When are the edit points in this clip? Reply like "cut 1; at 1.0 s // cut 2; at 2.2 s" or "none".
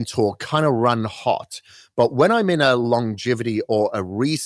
none